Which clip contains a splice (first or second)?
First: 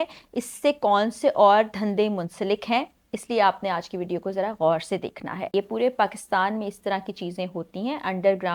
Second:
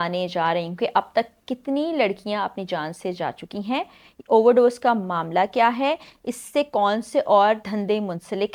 first